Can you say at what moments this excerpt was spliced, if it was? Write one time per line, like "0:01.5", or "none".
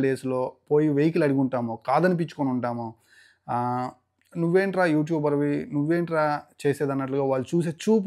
none